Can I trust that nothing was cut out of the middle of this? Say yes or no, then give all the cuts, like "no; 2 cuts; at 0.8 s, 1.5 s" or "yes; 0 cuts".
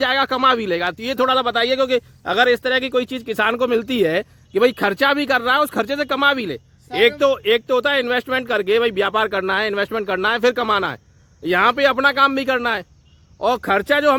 yes; 0 cuts